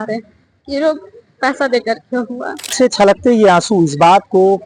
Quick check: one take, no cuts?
no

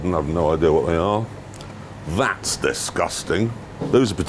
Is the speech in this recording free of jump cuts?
yes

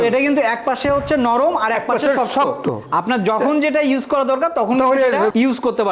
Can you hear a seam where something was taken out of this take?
no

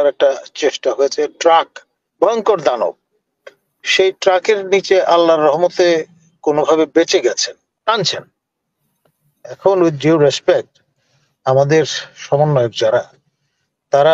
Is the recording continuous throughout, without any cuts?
no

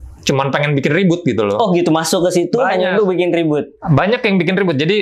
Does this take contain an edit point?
no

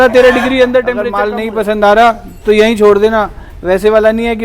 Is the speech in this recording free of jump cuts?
no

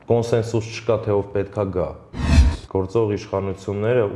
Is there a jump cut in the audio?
yes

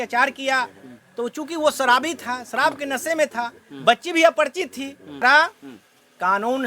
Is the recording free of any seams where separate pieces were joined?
no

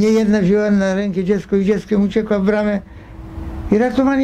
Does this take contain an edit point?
no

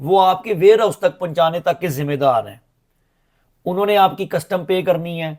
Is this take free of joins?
yes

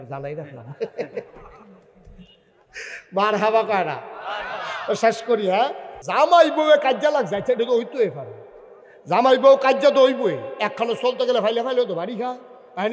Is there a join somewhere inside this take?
yes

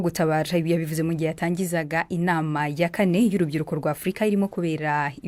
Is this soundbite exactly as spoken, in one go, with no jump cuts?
yes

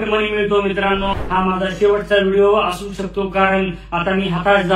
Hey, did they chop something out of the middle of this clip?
yes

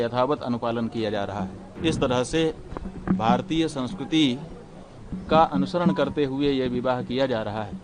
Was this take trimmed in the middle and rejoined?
yes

